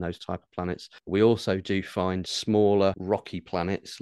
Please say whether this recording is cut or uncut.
cut